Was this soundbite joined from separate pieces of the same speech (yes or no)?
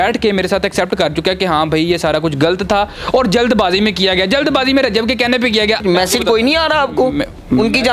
yes